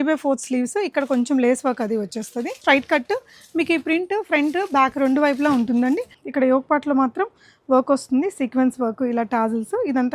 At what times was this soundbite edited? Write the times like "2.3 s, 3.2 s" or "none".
2.6 s, 6.2 s